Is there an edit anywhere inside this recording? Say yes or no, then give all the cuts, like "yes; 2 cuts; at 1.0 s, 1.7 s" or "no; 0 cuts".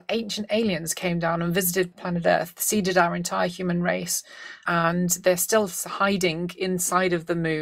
no; 0 cuts